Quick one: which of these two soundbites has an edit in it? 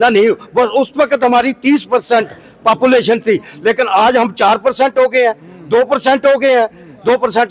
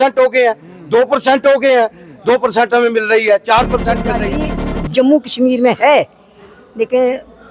second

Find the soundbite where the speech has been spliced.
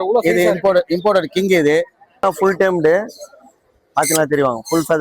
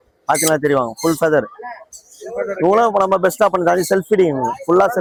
first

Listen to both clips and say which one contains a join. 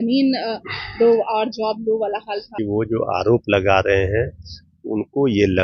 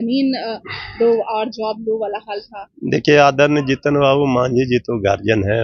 first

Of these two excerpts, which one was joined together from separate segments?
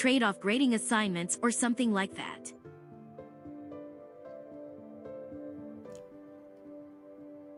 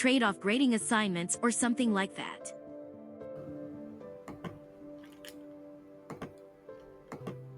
second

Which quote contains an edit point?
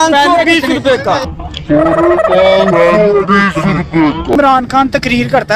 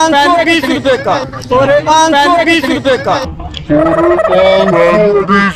first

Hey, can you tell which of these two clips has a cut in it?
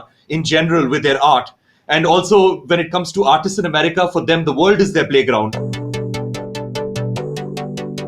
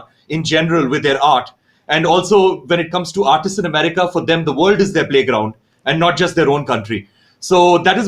first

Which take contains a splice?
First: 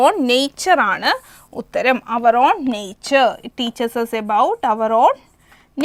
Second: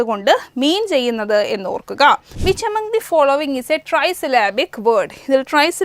second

